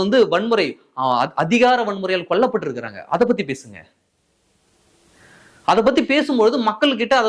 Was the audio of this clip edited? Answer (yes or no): no